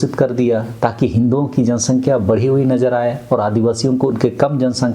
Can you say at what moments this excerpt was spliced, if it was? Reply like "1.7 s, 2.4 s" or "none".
none